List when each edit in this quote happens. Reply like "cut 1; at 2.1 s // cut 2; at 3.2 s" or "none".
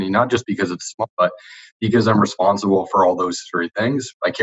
cut 1; at 1.1 s